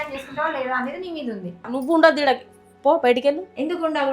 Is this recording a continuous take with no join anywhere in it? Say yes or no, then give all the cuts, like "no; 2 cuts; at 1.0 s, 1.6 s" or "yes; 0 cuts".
no; 1 cut; at 1.7 s